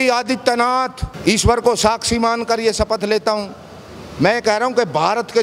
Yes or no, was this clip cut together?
yes